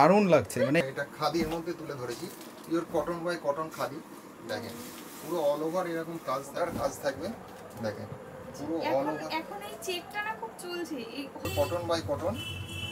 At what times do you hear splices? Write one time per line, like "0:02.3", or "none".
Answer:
0:00.8
0:06.5
0:11.5